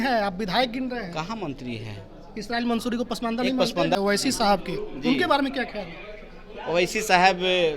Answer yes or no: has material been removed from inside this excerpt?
yes